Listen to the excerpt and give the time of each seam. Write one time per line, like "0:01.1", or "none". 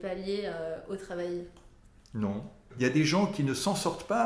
0:02.7